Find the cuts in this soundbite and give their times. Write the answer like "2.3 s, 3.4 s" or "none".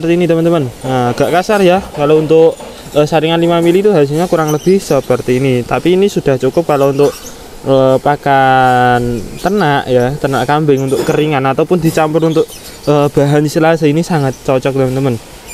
none

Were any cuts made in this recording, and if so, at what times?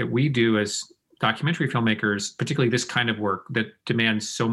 none

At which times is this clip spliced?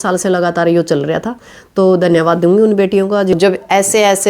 3.3 s

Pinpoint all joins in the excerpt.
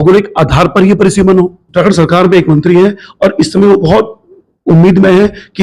1.6 s

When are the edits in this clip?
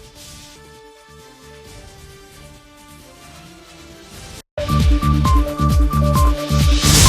4.4 s

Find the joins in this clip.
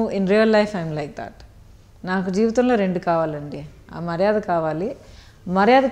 none

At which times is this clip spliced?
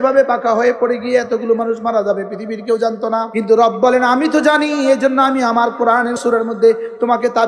3.3 s, 6.2 s

